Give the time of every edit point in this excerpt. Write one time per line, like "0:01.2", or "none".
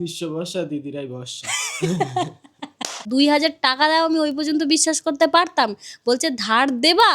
0:03.0